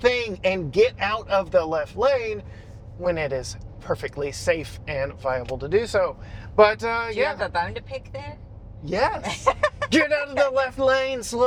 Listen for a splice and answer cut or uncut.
uncut